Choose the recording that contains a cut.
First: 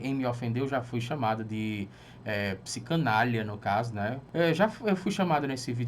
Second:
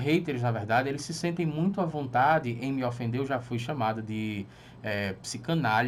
first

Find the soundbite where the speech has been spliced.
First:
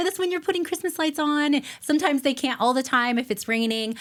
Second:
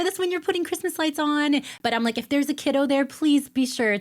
second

